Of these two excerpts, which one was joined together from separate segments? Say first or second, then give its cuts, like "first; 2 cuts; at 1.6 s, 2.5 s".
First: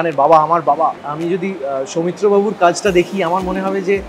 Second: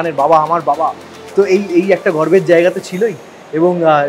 first; 1 cut; at 1.1 s